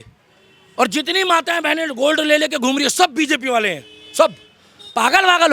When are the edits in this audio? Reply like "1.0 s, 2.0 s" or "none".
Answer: none